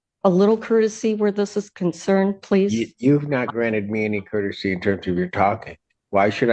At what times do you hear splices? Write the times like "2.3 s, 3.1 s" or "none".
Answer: none

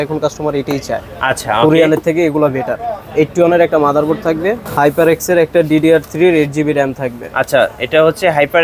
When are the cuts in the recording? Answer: none

